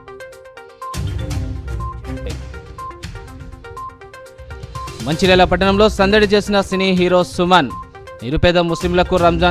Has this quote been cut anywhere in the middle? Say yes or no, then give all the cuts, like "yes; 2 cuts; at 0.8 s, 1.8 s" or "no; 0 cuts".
yes; 1 cut; at 0.9 s